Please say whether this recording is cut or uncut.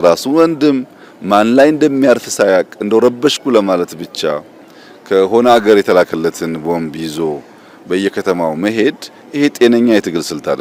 uncut